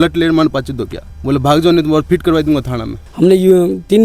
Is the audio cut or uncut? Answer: cut